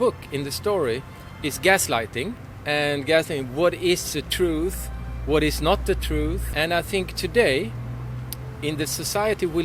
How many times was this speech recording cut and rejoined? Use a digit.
2